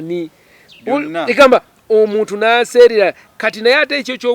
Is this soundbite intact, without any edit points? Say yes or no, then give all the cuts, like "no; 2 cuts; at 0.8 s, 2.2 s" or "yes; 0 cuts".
yes; 0 cuts